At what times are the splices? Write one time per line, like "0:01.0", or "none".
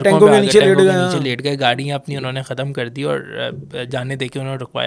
none